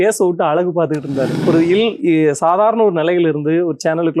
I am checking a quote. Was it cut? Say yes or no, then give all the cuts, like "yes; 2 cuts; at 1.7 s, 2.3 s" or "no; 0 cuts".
yes; 1 cut; at 1.3 s